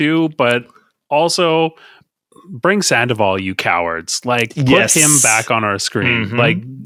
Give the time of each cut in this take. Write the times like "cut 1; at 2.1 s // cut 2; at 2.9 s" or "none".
none